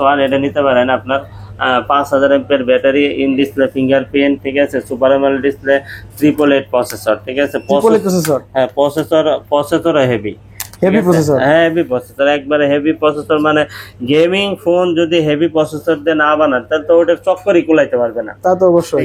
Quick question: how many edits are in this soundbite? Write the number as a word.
zero